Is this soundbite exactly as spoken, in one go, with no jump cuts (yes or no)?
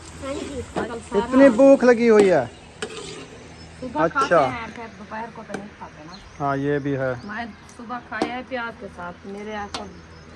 no